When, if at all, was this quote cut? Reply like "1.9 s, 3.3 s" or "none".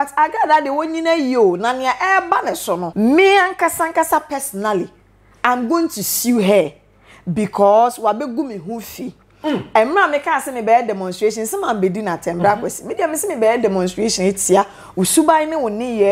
2.9 s